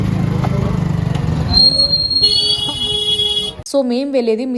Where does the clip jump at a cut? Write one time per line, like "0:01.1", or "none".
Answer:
0:03.6